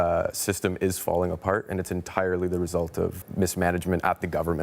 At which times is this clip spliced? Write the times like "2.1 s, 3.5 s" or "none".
3.2 s